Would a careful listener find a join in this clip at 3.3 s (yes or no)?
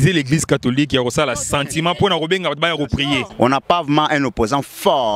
yes